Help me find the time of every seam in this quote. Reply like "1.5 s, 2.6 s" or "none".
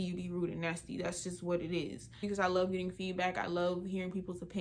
2.2 s